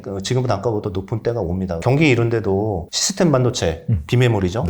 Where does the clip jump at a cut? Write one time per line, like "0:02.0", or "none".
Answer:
0:01.8
0:03.0